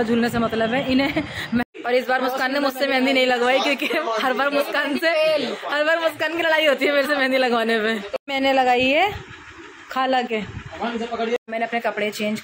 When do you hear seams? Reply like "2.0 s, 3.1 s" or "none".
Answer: 1.6 s, 8.1 s, 11.4 s